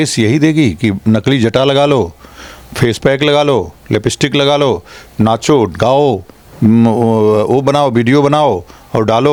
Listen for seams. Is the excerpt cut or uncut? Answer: uncut